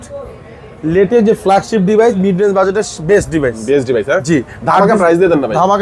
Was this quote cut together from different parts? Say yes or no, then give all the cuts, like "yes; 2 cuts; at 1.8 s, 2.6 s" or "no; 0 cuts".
no; 0 cuts